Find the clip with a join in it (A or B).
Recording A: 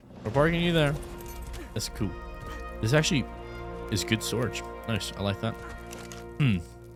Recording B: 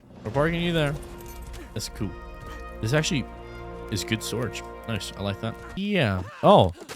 B